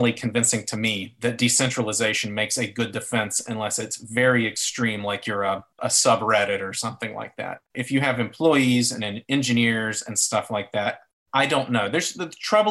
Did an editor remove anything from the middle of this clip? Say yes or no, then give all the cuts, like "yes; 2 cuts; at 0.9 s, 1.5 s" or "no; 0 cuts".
yes; 2 cuts; at 5.8 s, 7.7 s